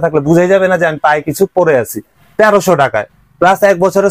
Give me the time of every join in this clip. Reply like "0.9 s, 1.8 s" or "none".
2.2 s